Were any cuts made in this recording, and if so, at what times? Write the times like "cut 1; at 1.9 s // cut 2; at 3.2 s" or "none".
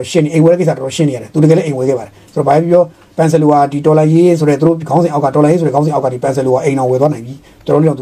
none